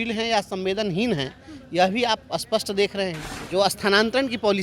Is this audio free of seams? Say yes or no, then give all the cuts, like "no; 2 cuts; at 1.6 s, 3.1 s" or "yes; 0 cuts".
no; 1 cut; at 3.3 s